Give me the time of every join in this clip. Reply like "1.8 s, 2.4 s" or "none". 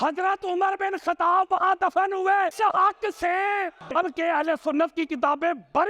2.5 s, 3.9 s

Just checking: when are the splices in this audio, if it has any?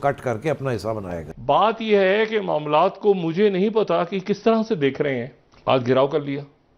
1.3 s

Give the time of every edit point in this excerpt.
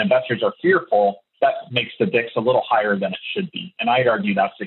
1.5 s

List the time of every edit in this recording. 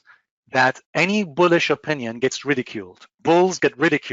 none

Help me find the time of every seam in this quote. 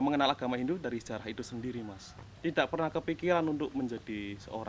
2.1 s

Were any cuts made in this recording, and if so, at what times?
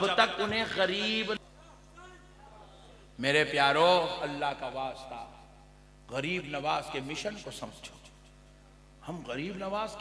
1.4 s

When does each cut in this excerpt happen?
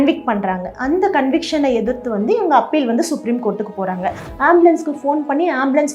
4.3 s

